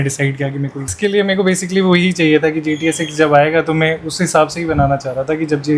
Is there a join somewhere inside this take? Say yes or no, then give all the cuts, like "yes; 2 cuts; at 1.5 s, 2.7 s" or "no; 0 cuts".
yes; 1 cut; at 0.9 s